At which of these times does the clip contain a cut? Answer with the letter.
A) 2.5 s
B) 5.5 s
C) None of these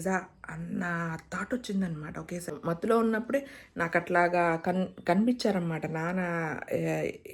A